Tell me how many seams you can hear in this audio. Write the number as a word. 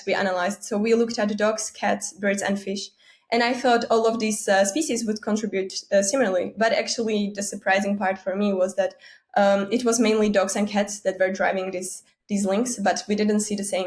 zero